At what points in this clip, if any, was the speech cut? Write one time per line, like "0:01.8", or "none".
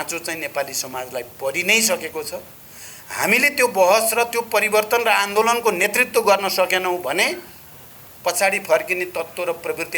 none